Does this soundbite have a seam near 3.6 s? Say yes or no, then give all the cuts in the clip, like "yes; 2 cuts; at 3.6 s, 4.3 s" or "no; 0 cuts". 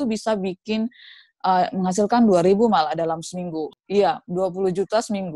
yes; 1 cut; at 3.6 s